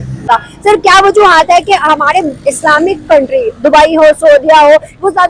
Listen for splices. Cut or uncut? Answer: uncut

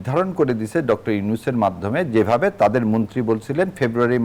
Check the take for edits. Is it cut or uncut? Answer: uncut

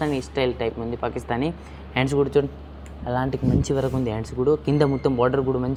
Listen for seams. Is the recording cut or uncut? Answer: uncut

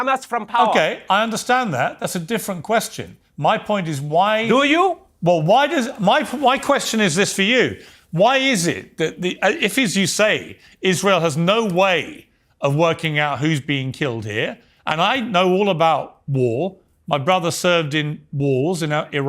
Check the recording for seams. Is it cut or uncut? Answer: uncut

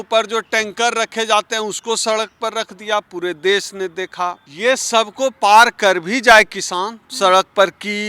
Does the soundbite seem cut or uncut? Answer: cut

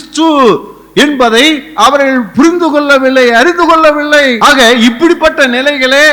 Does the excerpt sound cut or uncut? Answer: cut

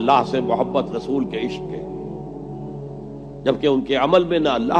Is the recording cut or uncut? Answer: uncut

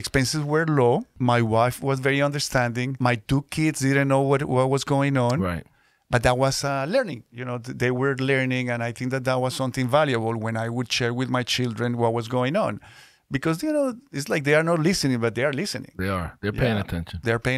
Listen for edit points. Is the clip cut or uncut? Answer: cut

